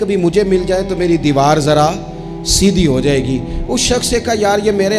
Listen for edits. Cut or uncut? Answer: uncut